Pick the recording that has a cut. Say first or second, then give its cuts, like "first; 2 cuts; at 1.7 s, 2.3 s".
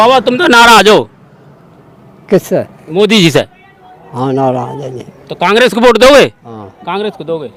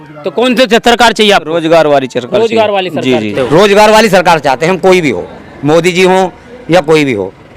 second; 1 cut; at 3.4 s